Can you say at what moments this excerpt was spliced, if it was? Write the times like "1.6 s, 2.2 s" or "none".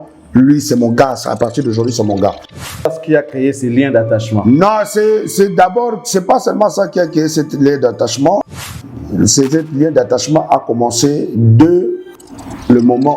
2.9 s, 8.5 s